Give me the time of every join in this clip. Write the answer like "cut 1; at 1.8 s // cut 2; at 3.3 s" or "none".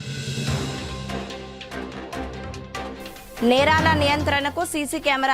cut 1; at 1.4 s